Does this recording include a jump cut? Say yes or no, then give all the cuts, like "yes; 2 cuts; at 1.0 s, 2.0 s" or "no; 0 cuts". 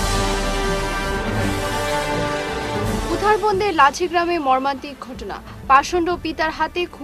no; 0 cuts